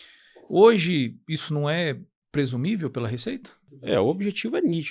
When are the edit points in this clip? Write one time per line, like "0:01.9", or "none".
0:03.8